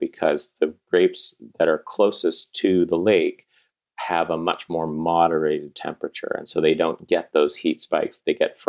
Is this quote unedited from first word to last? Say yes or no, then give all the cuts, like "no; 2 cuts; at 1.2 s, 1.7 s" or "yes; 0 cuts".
yes; 0 cuts